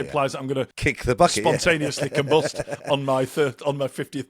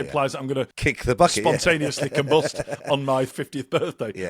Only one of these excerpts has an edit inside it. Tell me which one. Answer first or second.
second